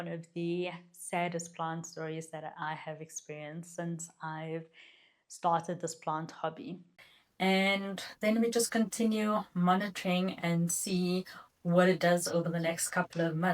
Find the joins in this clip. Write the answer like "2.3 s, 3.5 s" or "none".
6.9 s